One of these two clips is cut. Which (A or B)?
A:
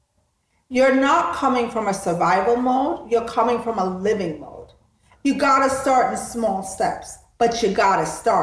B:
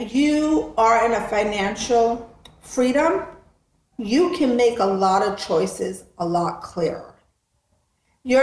A